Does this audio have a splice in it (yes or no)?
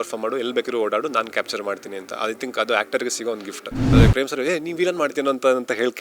yes